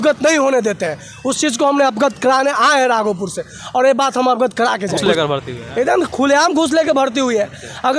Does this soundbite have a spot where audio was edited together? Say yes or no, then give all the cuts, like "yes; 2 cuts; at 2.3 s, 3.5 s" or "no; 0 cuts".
yes; 1 cut; at 5.0 s